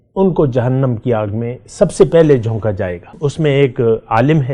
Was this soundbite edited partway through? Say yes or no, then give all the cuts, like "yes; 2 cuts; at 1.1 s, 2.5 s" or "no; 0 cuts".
yes; 1 cut; at 3.0 s